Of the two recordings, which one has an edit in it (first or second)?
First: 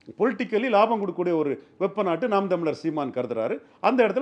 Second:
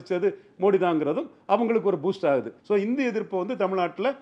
second